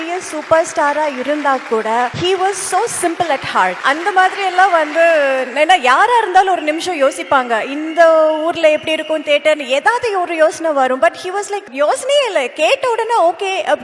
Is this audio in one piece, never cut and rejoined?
no; 3 cuts; at 2.1 s, 3.8 s, 11.7 s

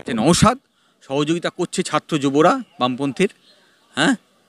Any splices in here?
no; 0 cuts

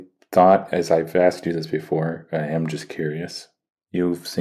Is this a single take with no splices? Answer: yes; 0 cuts

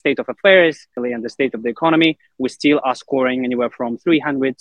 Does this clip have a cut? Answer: yes; 1 cut; at 0.9 s

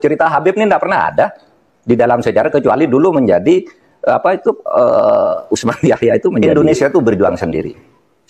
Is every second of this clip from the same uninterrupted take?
no; 1 cut; at 6.5 s

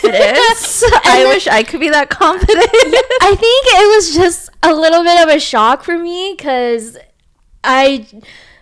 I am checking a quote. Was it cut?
no; 0 cuts

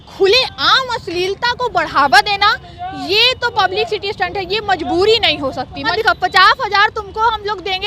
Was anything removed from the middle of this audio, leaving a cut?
yes; 1 cut; at 5.8 s

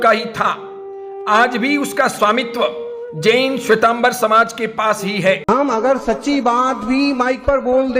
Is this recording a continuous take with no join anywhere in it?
no; 1 cut; at 5.4 s

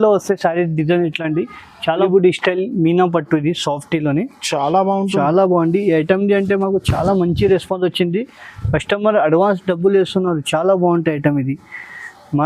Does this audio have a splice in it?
yes; 1 cut; at 2.0 s

